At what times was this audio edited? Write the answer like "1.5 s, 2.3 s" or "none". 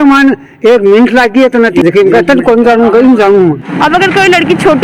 1.8 s, 3.7 s